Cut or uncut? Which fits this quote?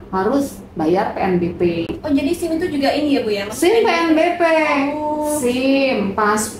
uncut